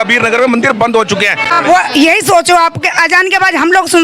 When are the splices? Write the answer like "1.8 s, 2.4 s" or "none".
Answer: 1.5 s